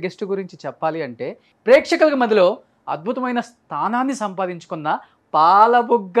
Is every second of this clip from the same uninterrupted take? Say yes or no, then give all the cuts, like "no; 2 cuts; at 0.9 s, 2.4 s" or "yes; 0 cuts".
no; 1 cut; at 1.5 s